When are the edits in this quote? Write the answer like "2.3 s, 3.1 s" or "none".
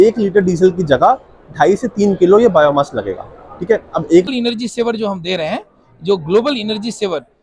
4.3 s

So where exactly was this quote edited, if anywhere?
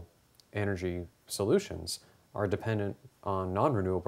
none

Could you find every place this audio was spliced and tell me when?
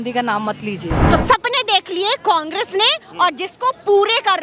1.0 s

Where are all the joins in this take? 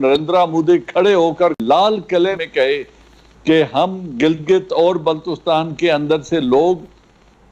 1.6 s, 2.4 s

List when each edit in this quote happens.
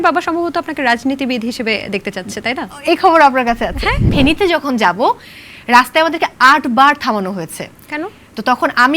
4.0 s

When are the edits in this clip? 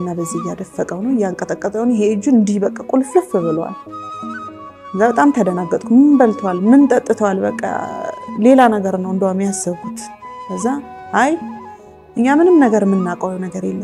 none

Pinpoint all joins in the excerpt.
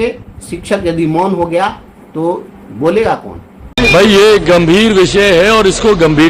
3.7 s

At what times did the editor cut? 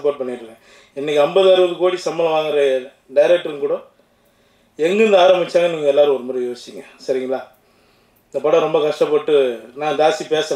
none

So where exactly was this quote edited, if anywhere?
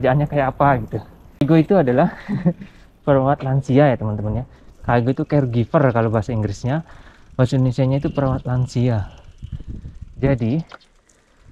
1.4 s

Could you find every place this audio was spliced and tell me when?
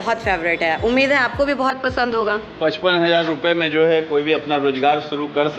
2.4 s

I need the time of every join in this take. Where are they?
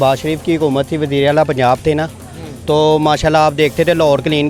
none

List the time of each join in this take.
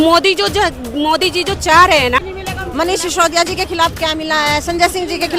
2.3 s

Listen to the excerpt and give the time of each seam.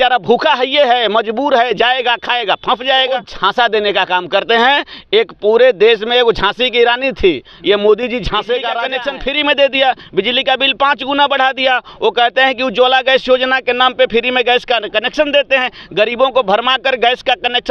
3.3 s, 8.9 s

